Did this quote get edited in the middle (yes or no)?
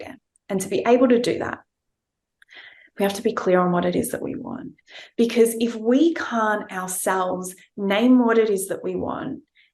yes